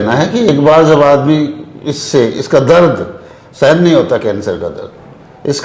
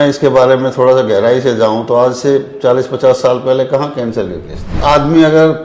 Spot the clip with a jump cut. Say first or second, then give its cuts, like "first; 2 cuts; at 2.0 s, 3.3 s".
second; 1 cut; at 4.7 s